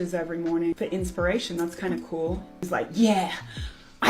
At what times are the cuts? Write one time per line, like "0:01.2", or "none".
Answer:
0:00.7
0:02.6

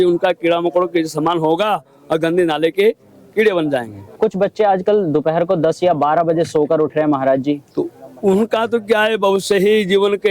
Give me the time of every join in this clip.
0:04.2

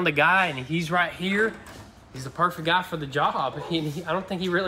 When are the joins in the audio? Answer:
none

